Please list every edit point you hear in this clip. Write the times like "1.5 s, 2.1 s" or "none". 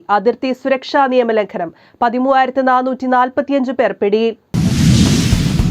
4.5 s